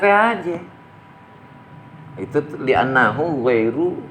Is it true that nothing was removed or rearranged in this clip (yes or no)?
yes